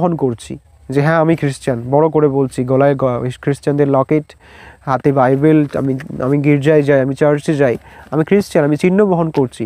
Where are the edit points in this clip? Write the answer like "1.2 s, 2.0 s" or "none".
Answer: none